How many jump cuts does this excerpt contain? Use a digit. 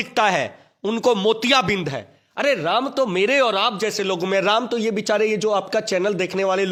0